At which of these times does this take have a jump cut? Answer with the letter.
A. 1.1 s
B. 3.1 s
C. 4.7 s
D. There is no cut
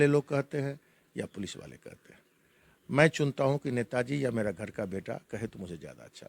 D